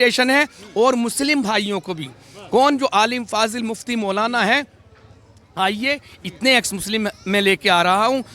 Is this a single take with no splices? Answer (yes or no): yes